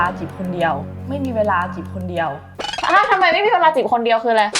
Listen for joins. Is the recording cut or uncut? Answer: uncut